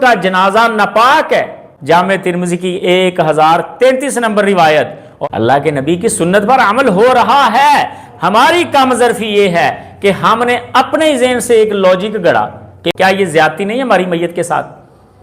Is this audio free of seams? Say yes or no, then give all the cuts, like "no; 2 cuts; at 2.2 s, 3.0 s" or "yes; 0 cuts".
no; 3 cuts; at 1.6 s, 5.0 s, 12.9 s